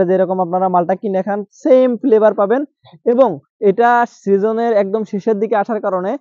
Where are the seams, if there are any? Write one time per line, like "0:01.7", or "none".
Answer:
none